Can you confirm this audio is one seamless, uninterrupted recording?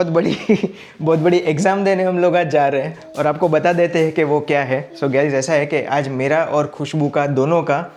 yes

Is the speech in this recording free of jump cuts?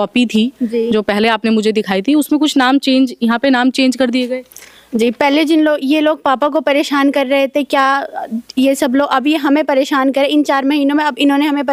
yes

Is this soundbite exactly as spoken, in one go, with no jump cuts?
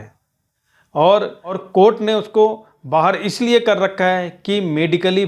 yes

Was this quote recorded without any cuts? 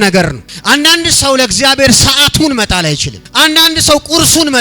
no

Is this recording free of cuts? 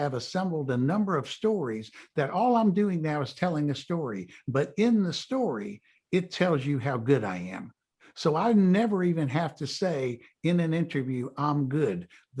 yes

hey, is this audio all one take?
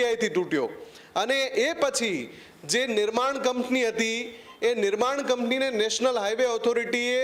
yes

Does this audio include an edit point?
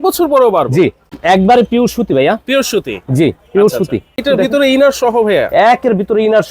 yes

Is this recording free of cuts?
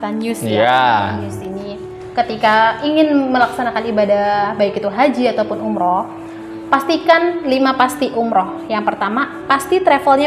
yes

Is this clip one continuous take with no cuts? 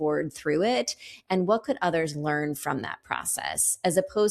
yes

